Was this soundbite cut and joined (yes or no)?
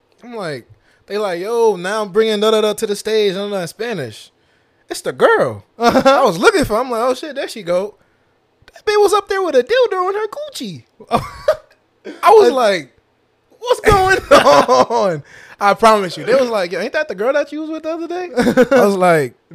no